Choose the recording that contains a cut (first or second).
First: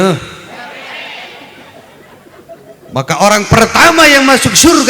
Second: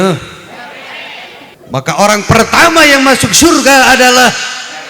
second